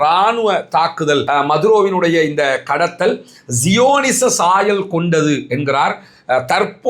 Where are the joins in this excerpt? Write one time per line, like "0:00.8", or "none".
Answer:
0:01.2